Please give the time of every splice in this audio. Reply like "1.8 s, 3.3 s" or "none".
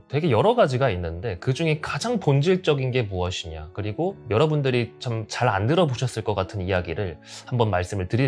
none